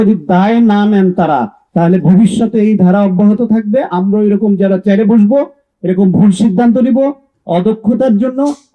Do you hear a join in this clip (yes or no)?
no